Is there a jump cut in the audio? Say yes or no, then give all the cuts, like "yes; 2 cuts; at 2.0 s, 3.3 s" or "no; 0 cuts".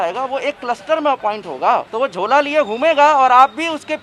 yes; 1 cut; at 1.9 s